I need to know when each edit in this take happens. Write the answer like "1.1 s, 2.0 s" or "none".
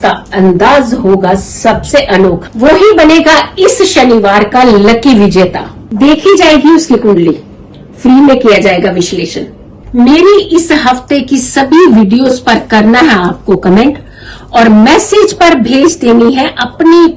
none